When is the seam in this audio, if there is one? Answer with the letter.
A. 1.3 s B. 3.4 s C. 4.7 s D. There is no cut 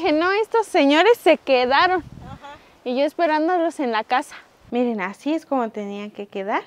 C